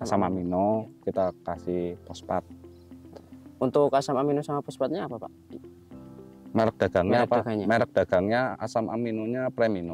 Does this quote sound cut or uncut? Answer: uncut